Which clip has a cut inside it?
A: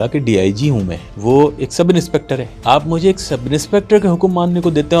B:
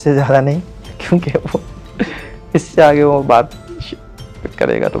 A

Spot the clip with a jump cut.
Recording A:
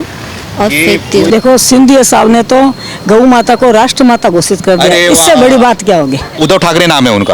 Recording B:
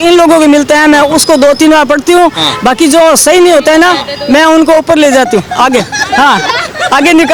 A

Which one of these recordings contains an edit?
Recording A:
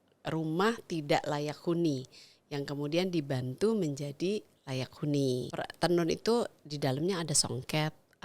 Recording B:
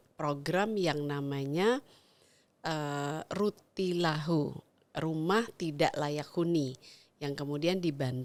A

